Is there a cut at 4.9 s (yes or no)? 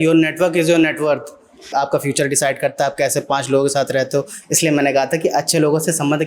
no